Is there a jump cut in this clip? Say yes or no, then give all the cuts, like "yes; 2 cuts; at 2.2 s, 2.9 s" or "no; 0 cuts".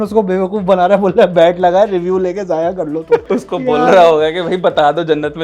yes; 1 cut; at 3.2 s